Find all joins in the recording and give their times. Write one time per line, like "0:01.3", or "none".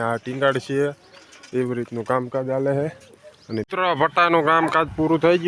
0:03.7